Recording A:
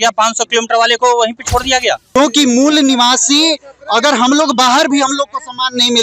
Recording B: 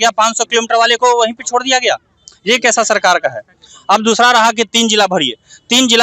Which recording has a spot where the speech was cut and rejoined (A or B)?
A